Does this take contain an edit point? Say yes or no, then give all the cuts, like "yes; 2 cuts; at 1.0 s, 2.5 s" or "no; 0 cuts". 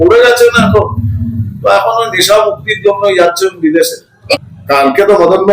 yes; 1 cut; at 4.4 s